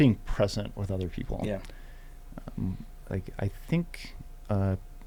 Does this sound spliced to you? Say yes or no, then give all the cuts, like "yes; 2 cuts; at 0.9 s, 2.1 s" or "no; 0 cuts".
no; 0 cuts